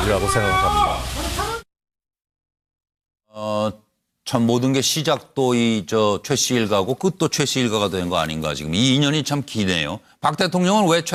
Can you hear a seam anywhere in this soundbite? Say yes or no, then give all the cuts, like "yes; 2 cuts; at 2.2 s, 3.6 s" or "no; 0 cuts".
no; 0 cuts